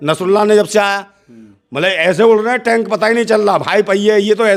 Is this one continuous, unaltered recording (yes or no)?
yes